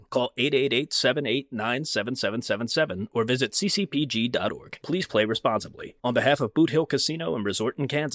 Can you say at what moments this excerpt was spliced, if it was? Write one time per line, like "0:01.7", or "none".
none